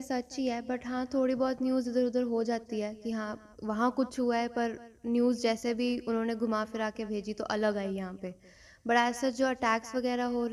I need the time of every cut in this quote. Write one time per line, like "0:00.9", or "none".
none

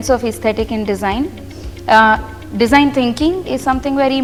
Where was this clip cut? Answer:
none

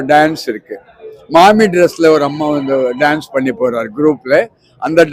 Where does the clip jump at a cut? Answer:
none

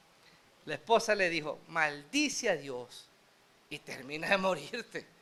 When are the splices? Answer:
none

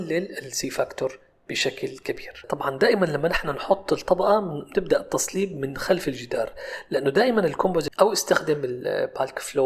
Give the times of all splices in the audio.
0:02.3
0:07.9

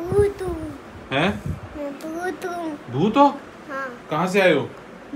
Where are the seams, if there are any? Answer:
none

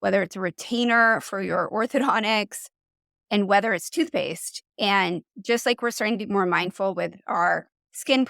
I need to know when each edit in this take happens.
0:05.3

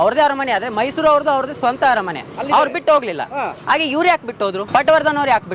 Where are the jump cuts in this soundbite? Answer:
0:04.6

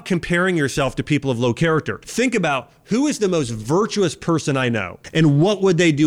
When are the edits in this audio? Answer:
0:02.0
0:05.0

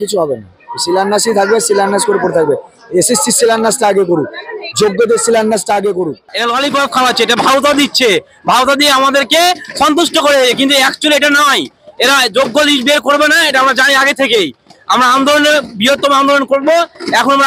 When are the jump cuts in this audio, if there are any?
0:06.3

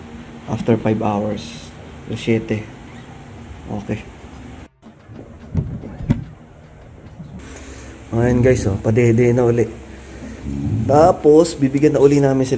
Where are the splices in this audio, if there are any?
0:07.4

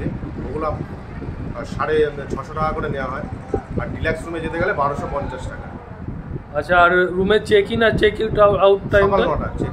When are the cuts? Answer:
none

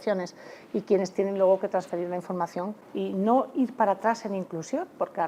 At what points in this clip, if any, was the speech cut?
0:02.8

